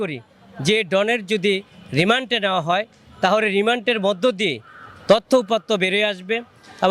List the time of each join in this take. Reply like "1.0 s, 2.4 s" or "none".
none